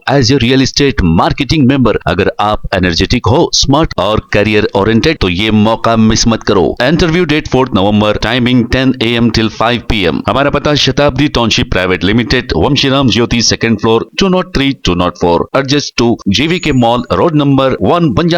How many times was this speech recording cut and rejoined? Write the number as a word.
zero